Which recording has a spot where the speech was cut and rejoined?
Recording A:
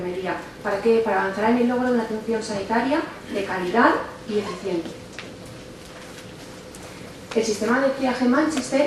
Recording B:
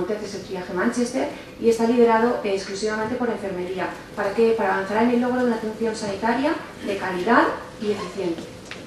A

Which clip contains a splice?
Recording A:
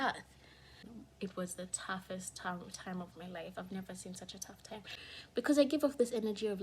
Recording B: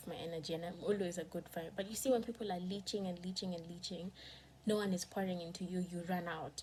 A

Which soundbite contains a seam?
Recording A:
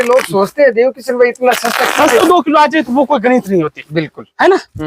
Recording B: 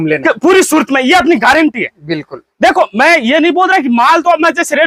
A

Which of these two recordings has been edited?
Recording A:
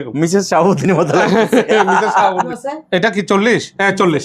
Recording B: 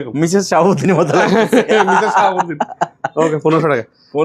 A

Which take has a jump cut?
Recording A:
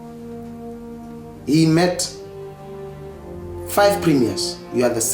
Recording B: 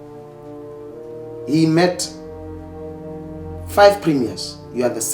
B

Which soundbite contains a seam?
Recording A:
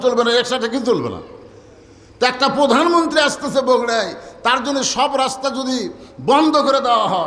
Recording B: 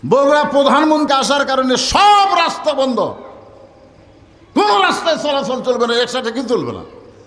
B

